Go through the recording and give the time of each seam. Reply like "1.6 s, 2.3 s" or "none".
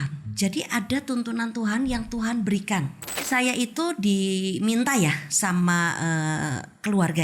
3.2 s